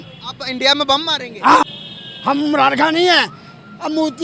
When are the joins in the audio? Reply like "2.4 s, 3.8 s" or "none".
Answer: 1.8 s